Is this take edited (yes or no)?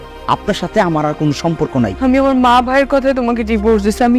yes